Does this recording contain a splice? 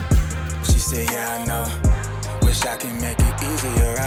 no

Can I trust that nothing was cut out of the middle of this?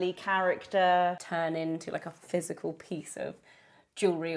no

